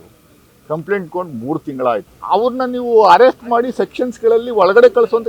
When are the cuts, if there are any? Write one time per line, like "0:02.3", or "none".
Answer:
0:02.1